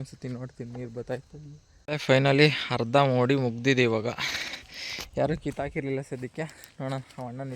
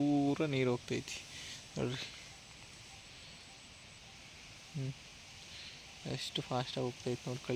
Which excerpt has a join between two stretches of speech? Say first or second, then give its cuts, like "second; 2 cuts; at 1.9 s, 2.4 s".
first; 1 cut; at 1.7 s